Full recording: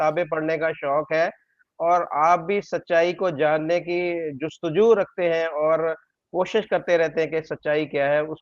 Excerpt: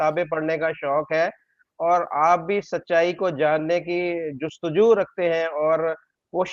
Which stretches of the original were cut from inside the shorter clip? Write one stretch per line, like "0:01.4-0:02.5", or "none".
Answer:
none